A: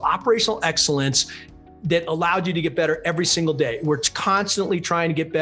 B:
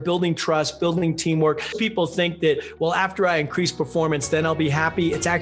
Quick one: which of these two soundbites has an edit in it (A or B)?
B